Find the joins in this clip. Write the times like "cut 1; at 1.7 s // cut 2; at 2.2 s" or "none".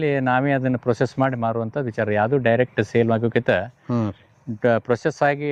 none